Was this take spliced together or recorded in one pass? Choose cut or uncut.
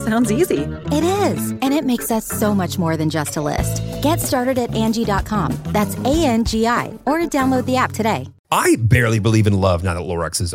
cut